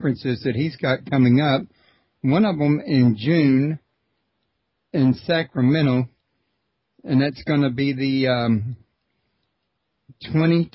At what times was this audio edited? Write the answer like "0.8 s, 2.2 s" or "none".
1.2 s